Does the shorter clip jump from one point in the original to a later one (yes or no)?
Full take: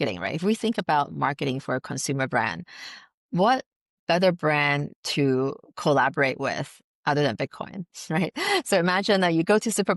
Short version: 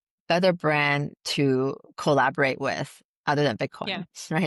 no